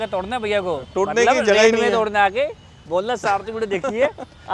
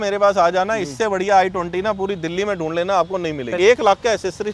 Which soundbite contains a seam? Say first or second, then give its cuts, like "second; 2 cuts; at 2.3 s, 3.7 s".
second; 1 cut; at 3.5 s